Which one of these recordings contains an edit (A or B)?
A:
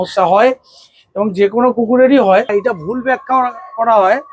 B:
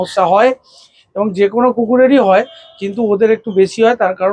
A